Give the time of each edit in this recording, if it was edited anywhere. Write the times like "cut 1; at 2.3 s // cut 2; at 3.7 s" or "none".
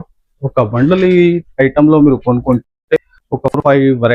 none